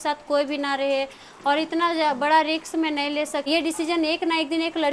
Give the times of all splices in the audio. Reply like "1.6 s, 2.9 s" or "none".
3.5 s